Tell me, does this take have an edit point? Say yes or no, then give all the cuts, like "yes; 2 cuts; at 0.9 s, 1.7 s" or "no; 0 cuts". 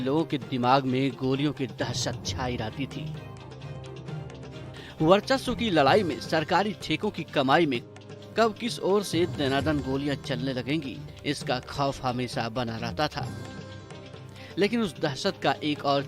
no; 0 cuts